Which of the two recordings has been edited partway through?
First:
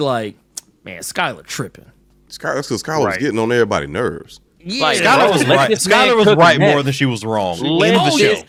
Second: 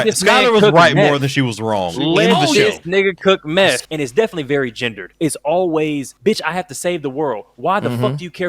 second; 3 cuts; at 3.8 s, 5.1 s, 6.1 s

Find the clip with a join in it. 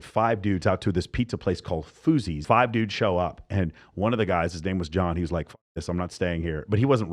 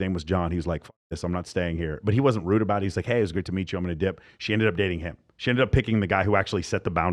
first; 1 cut; at 2.4 s

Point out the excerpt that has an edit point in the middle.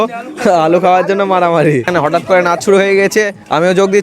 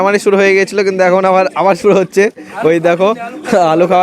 first; 1 cut; at 1.9 s

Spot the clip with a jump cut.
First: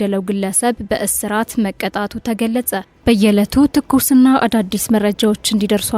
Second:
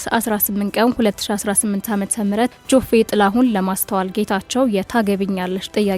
first; 1 cut; at 2.9 s

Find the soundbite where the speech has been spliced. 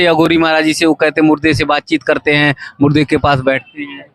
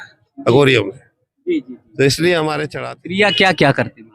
second; 1 cut; at 2.7 s

